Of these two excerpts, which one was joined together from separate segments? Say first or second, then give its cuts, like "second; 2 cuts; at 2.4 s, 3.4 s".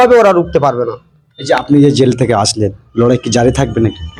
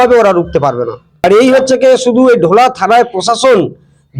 second; 1 cut; at 1.0 s